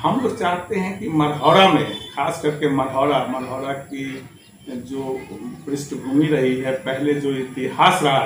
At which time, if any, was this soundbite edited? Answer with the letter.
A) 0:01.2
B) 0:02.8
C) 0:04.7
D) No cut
D